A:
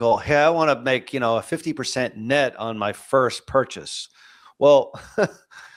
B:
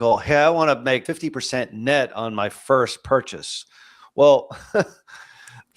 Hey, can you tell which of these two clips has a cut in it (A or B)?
B